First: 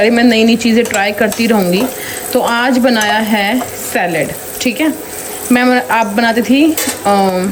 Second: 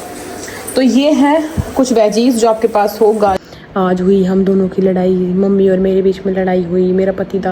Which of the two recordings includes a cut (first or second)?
second